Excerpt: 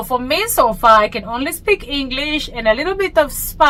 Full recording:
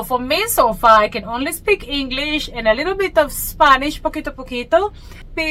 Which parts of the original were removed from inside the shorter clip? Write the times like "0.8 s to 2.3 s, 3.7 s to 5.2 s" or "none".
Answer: none

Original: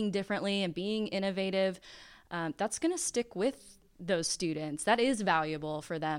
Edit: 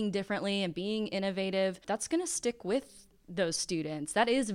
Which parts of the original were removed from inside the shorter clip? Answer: 1.8 s to 2.5 s

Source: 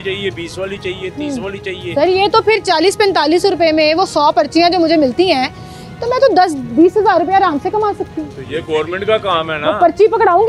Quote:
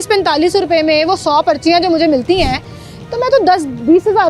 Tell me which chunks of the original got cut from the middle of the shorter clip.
none

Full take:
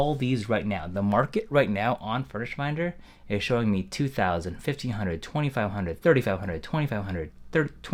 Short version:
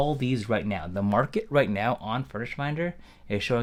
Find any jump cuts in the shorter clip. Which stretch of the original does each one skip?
none

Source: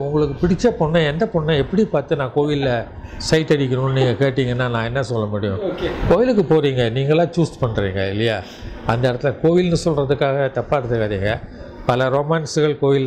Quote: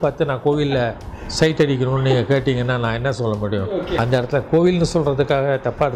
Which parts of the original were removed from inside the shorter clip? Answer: 5.9 s to 8.9 s

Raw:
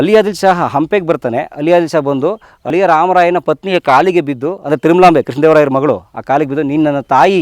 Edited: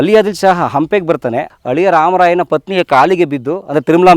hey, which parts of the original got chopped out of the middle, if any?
1.5 s to 2.5 s

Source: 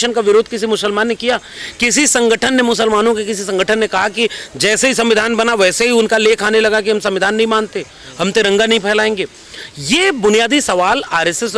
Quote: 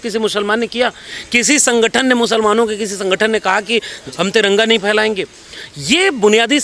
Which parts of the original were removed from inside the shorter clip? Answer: 4.5 s to 8.0 s

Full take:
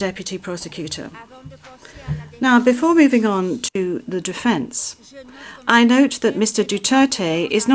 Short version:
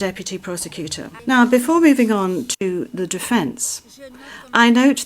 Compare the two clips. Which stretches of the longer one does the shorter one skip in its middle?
1.1 s to 2.3 s

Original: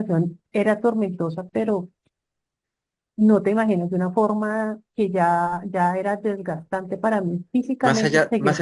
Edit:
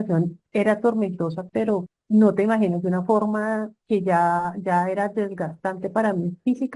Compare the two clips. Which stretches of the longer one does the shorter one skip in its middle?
1.9 s to 3.0 s

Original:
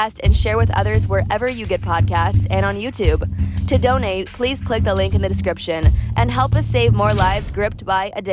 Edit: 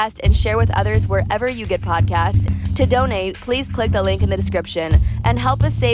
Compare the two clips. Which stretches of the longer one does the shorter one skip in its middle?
2.4 s to 3.3 s

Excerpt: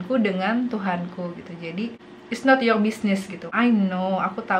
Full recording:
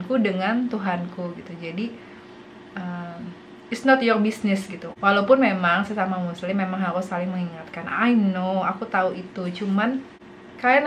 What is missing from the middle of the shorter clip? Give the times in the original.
2.1 s to 3.5 s, 4.8 s to 7.8 s

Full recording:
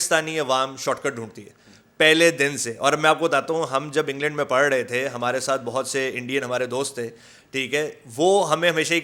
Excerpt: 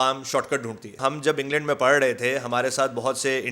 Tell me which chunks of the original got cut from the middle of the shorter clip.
1.5 s to 3.7 s

